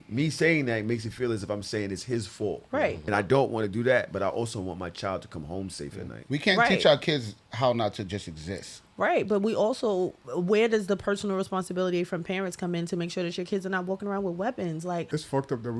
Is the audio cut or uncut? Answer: cut